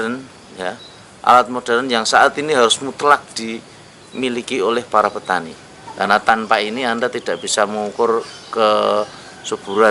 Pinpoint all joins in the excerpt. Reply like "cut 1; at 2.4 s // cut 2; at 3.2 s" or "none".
cut 1; at 5.6 s